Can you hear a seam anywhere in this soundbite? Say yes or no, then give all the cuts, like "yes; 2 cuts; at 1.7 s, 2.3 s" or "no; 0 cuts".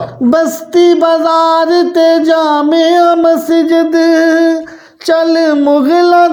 no; 0 cuts